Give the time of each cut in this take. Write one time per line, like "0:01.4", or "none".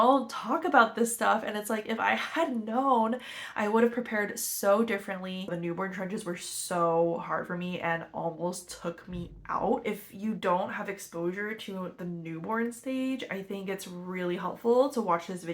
0:05.5
0:09.8